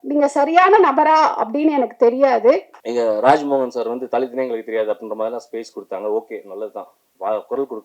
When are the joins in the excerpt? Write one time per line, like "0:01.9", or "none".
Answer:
0:02.8